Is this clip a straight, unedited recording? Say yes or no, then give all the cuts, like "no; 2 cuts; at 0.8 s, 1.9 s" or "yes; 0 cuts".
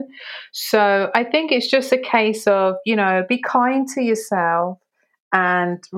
yes; 0 cuts